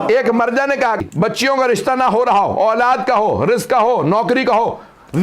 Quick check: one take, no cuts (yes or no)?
no